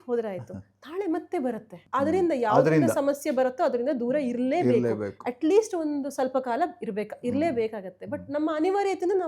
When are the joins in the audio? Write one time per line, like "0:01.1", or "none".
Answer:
0:01.7